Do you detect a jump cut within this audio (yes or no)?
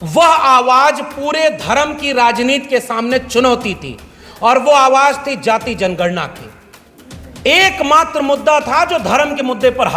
no